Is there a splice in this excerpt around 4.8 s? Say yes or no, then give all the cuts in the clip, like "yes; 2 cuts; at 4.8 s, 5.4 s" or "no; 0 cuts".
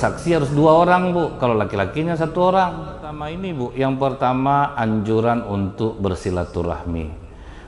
no; 1 cut; at 3.4 s